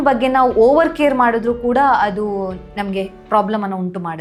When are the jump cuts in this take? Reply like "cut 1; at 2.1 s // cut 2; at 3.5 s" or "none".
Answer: none